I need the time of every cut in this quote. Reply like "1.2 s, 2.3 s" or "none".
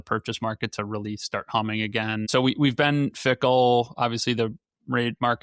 2.3 s